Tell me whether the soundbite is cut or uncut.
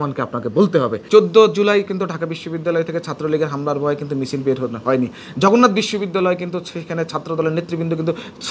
cut